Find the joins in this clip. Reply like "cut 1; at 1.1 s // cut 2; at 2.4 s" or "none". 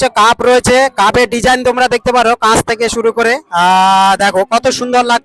none

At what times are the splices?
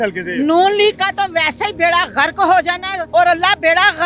cut 1; at 2.9 s

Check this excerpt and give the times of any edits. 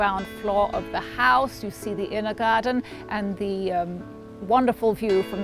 none

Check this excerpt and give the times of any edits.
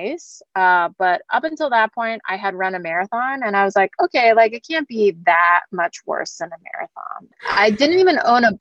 cut 1; at 7.2 s

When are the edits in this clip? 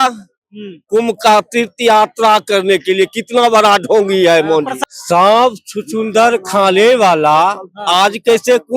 cut 1; at 4.7 s

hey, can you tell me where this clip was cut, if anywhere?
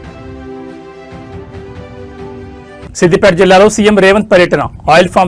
cut 1; at 2.4 s

